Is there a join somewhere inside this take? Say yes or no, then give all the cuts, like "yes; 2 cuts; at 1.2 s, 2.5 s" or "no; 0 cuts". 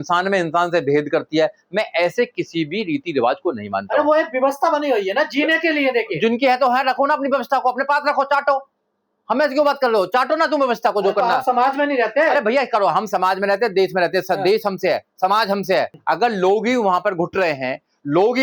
yes; 1 cut; at 16.0 s